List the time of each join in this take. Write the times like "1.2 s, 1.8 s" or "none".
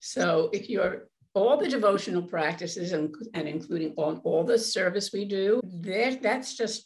5.6 s